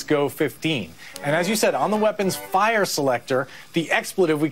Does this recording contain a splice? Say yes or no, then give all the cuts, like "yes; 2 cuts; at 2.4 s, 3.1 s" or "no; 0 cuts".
yes; 1 cut; at 1.2 s